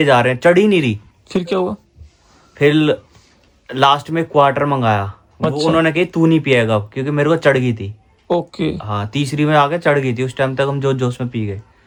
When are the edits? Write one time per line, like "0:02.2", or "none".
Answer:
none